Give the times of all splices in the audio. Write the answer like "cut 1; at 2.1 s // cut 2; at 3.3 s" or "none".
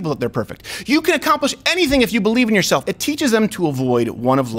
cut 1; at 2.8 s